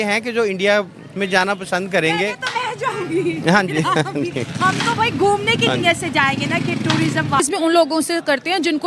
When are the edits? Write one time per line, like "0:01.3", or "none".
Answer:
0:07.4